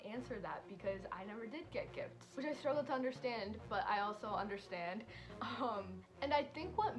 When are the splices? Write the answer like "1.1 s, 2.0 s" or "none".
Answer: 2.2 s, 5.9 s